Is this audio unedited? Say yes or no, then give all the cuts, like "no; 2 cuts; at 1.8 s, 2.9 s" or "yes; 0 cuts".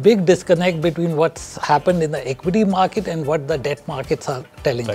yes; 0 cuts